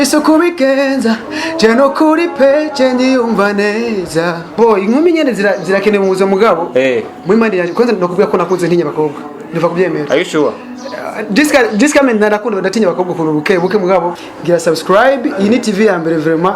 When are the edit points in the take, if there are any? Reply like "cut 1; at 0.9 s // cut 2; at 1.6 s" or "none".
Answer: cut 1; at 4.5 s // cut 2; at 14.2 s